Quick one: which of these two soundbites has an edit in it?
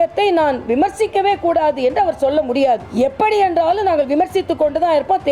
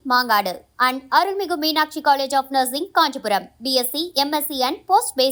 first; 1 cut; at 2.9 s

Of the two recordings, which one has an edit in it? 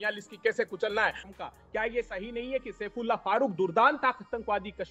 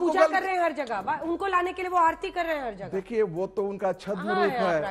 first; 1 cut; at 1.3 s

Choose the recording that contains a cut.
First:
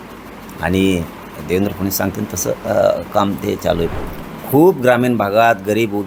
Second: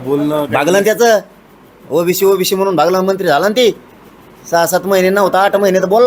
first; 1 cut; at 3.9 s

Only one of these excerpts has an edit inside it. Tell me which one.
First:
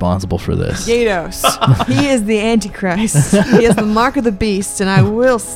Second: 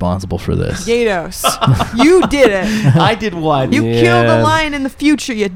first; 1 cut; at 1.8 s

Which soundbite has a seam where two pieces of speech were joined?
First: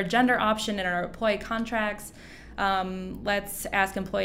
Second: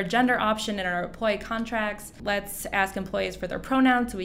second; 1 cut; at 2.1 s

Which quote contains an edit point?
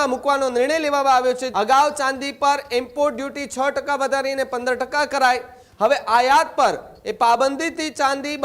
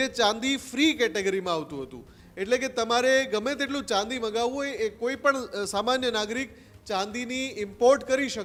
first; 1 cut; at 1.4 s

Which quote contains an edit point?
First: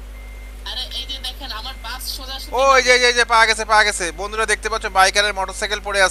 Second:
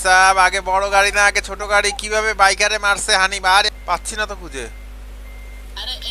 second; 1 cut; at 3.7 s

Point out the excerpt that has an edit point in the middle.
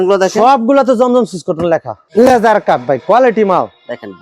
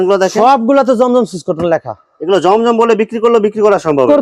first; 1 cut; at 2.0 s

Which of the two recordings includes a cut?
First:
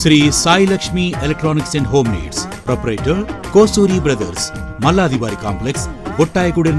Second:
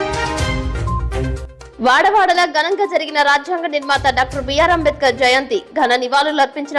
second; 1 cut; at 1.0 s

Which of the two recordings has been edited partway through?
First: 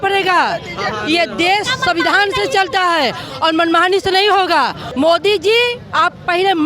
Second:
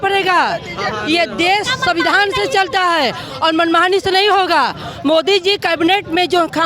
first; 1 cut; at 4.8 s

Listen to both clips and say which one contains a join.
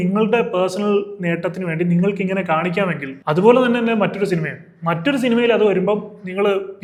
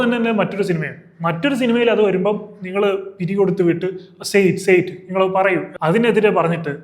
second; 1 cut; at 5.7 s

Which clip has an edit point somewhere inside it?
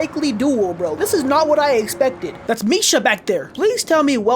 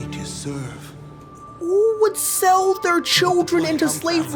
first; 2 cuts; at 2.3 s, 3.5 s

